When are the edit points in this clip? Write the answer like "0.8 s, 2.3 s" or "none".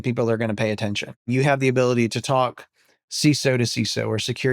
1.3 s

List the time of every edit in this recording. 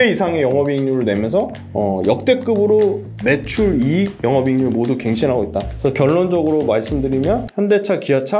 1.6 s, 3.1 s, 4.1 s, 5.7 s, 7.5 s

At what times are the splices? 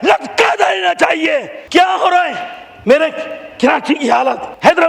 1.6 s

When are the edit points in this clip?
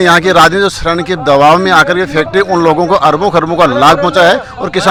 none

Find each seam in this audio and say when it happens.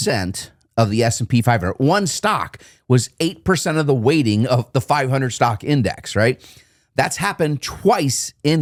none

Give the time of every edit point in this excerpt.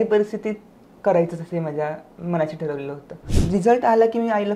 3.3 s

